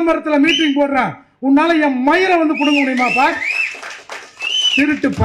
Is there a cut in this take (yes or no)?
no